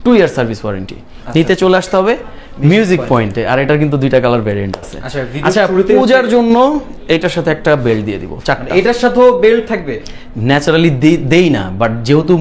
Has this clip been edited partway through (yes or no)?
no